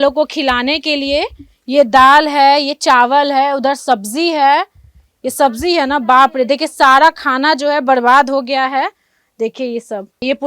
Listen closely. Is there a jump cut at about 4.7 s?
no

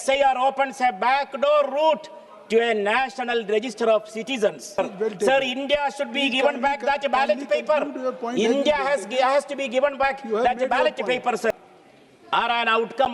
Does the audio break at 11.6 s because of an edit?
yes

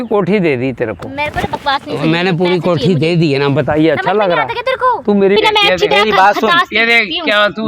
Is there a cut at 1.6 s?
no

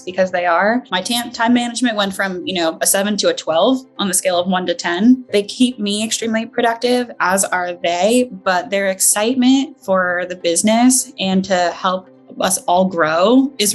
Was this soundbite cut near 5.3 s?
yes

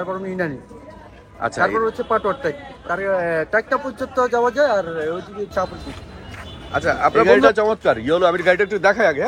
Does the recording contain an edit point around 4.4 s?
no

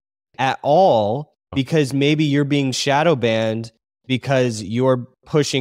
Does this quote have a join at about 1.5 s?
yes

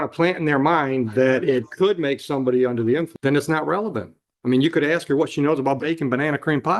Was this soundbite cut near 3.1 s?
yes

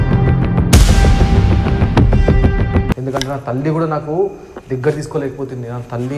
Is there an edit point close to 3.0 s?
yes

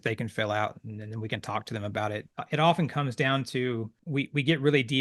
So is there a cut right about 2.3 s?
yes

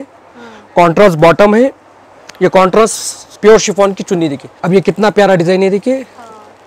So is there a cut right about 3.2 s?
yes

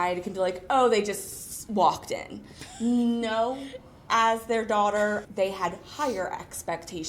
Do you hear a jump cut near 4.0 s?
yes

